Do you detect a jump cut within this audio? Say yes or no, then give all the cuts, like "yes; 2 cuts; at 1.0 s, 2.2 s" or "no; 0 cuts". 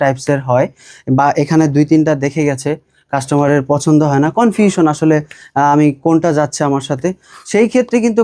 no; 0 cuts